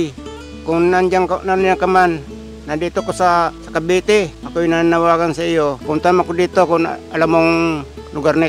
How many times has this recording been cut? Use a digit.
3